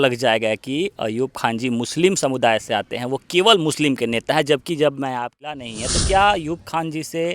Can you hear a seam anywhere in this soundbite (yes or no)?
yes